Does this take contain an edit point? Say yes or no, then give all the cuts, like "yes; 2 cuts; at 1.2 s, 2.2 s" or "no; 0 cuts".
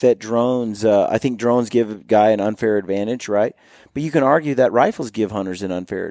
no; 0 cuts